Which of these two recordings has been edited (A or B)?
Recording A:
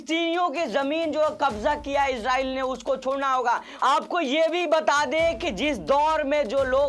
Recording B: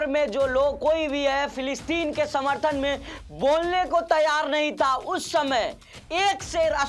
A